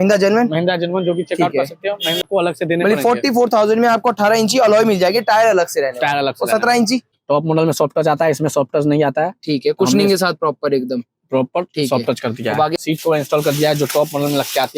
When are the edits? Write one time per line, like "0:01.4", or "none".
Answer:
0:02.2
0:07.2
0:12.8